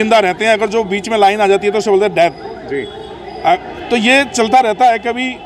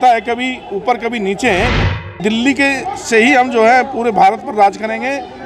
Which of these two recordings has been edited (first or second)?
second